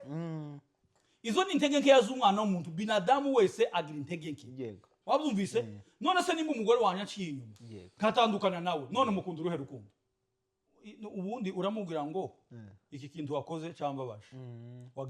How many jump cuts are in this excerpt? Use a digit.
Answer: 1